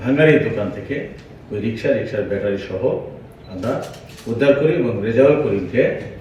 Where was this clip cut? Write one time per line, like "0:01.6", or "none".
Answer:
none